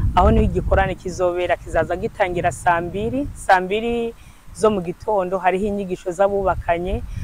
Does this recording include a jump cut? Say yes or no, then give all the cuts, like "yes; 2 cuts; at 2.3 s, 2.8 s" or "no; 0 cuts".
no; 0 cuts